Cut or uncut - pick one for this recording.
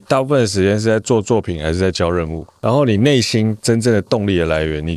cut